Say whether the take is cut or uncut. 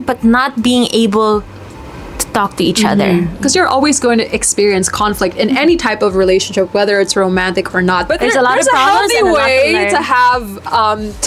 cut